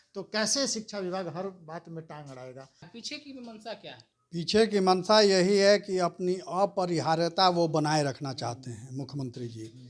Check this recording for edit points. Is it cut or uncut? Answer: cut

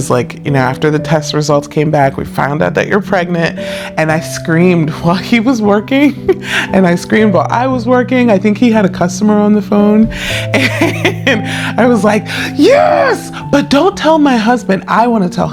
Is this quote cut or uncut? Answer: uncut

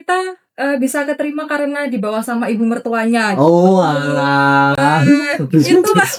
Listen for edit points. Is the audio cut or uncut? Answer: uncut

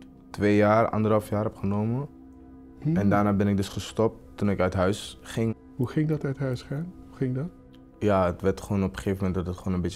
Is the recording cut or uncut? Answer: uncut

